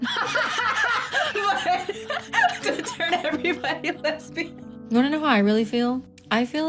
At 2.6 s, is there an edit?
no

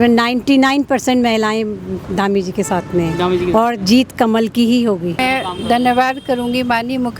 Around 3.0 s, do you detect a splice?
no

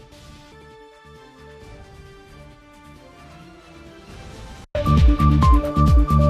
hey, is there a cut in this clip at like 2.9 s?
no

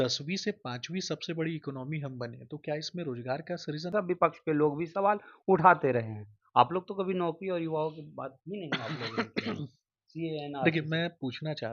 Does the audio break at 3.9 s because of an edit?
yes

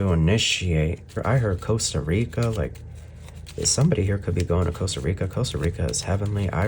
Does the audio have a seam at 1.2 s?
yes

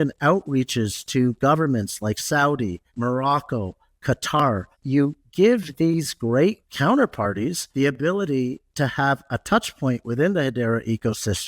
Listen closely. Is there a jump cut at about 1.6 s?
no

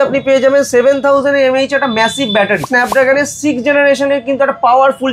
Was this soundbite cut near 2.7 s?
yes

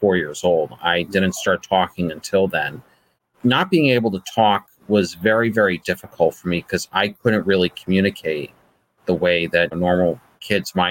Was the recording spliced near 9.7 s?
yes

